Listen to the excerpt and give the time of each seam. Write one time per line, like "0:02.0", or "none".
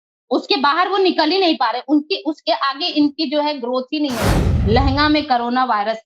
0:04.5